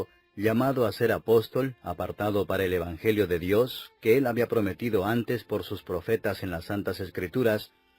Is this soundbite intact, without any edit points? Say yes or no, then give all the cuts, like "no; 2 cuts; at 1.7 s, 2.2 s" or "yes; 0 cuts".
no; 1 cut; at 1.8 s